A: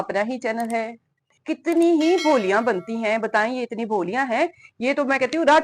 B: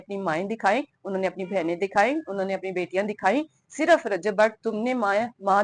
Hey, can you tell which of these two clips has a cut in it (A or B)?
A